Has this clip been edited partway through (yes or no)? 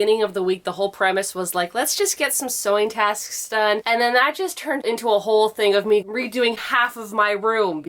yes